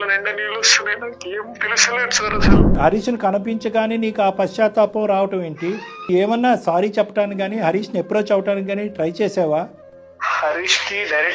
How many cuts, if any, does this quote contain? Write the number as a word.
two